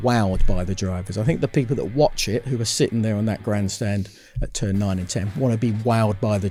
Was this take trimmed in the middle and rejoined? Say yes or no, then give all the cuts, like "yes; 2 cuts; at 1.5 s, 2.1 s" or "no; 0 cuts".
no; 0 cuts